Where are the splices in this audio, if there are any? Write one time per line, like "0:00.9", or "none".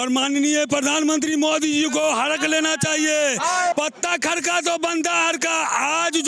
0:03.7